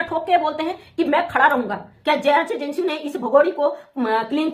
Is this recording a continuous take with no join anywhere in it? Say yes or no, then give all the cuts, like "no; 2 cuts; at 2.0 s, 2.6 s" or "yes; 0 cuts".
no; 1 cut; at 1.9 s